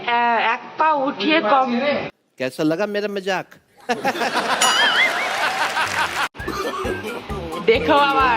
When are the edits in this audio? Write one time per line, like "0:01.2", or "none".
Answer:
0:06.3

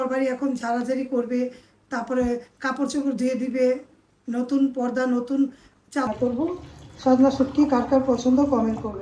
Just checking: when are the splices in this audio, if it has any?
0:06.1

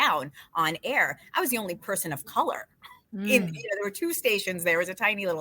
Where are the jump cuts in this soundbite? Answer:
none

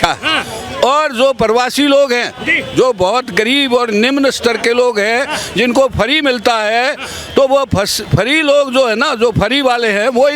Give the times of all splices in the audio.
none

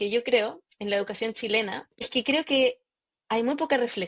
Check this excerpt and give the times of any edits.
0:02.1

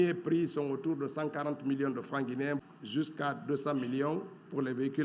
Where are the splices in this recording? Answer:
0:02.7

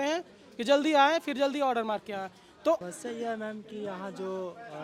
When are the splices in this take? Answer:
0:02.9

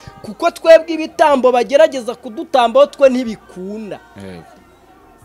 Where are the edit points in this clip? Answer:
none

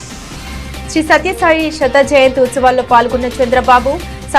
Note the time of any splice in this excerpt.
none

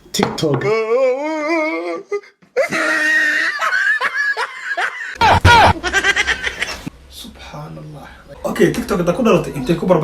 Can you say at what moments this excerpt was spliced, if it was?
0:05.0
0:08.2

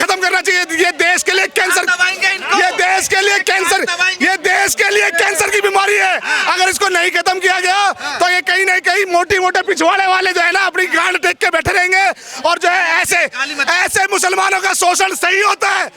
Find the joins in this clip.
none

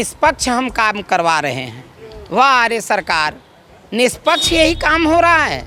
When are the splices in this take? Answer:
none

